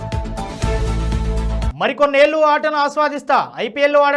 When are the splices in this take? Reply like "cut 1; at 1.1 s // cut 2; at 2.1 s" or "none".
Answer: cut 1; at 1.6 s

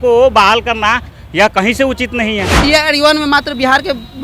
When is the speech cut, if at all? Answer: cut 1; at 2.5 s

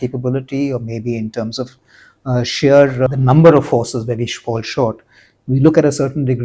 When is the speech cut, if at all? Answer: cut 1; at 3.1 s

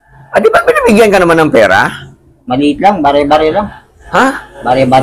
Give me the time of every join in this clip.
none

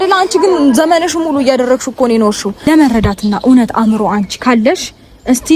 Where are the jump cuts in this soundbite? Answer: cut 1; at 2.7 s

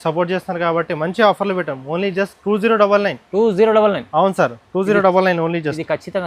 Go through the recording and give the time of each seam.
none

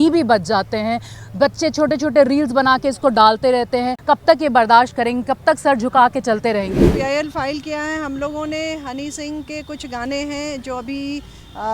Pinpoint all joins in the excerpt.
cut 1; at 3.9 s // cut 2; at 6.9 s

